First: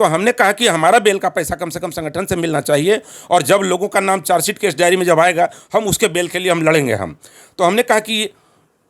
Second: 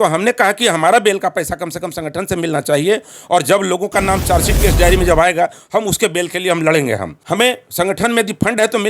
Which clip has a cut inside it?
second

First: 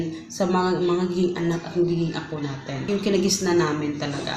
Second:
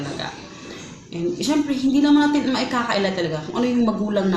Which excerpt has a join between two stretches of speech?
first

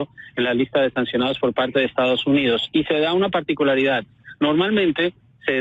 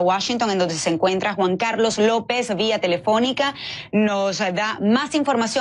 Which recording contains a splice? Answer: first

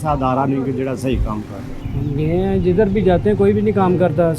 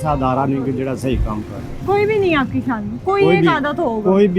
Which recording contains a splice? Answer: first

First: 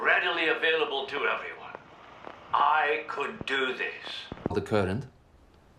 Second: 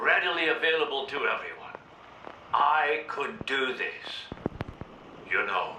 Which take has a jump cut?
second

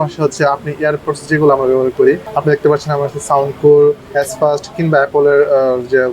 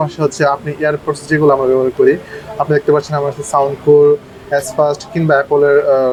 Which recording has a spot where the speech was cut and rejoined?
first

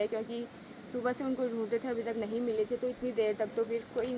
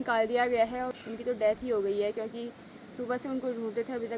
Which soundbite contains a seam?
second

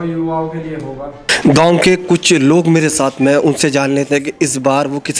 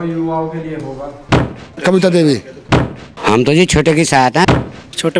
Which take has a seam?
second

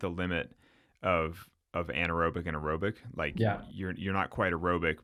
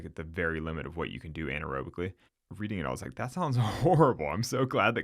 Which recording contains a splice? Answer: second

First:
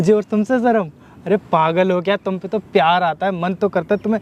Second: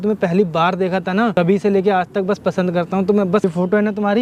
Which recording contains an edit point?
second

